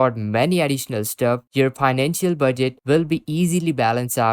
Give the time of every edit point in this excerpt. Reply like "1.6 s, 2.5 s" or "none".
none